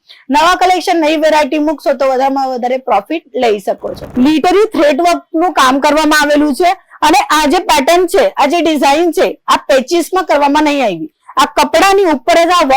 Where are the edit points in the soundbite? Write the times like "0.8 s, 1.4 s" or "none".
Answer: 4.0 s